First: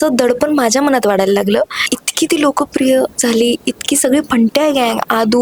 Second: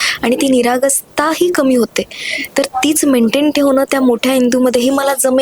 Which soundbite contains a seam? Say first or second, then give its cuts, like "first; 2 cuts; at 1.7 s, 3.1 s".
first; 1 cut; at 1.9 s